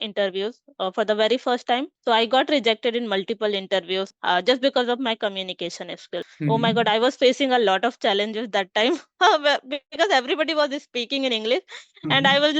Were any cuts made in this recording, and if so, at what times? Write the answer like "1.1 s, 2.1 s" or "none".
1.9 s, 4.1 s, 6.3 s